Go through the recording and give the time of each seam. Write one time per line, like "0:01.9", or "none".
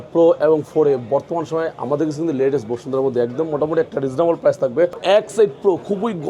0:05.0